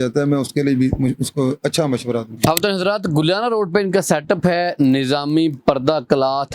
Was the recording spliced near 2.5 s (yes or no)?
yes